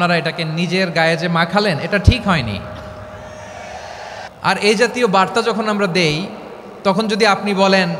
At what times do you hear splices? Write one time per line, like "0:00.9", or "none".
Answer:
0:04.2